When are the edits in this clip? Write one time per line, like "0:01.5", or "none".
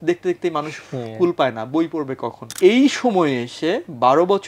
0:02.4